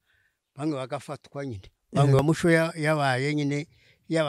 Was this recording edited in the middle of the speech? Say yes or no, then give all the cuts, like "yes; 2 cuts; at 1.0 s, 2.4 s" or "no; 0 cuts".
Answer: yes; 1 cut; at 2.2 s